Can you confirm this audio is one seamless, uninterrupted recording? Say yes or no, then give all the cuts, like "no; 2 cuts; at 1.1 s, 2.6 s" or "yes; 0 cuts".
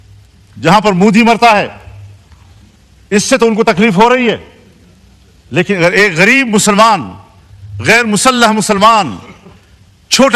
yes; 0 cuts